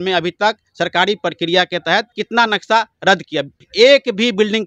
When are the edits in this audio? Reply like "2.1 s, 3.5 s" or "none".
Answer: 2.2 s, 3.5 s